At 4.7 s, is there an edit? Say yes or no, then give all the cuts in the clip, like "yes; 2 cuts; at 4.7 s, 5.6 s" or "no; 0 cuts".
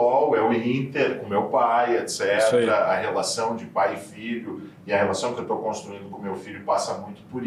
no; 0 cuts